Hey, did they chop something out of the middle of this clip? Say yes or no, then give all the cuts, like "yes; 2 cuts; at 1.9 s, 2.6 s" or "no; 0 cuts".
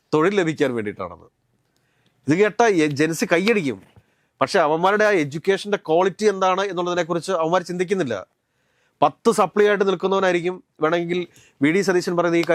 no; 0 cuts